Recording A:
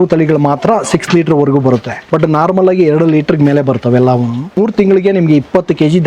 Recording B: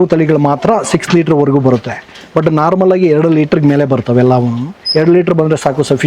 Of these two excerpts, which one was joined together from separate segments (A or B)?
A